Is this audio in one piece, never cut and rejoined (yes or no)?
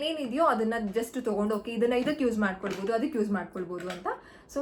yes